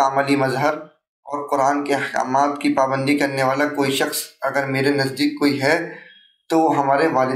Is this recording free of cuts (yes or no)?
yes